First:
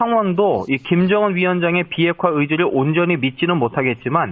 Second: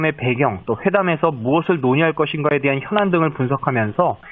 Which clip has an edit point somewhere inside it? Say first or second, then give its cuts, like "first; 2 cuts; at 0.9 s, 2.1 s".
second; 1 cut; at 1.0 s